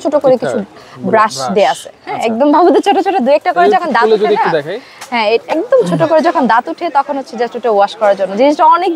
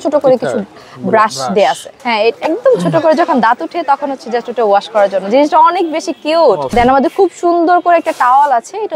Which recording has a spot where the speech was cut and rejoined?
second; 2 cuts; at 1.9 s, 6.6 s

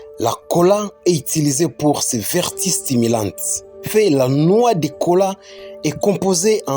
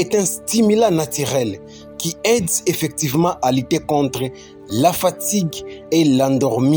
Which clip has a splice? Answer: first; 1 cut; at 3.9 s

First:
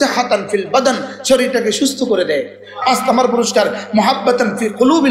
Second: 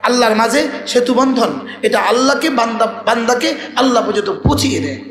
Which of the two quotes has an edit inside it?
first; 1 cut; at 2.8 s

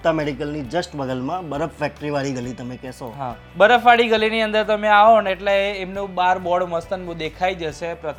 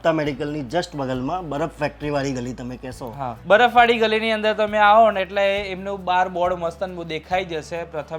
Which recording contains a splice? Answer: second; 1 cut; at 3.4 s

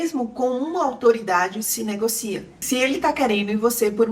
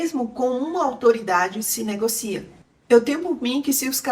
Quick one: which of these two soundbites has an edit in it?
second; 1 cut; at 2.5 s

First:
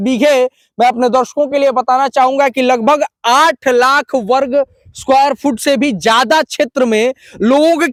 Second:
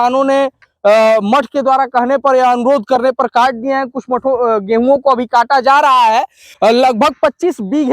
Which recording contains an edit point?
second; 1 cut; at 6.4 s

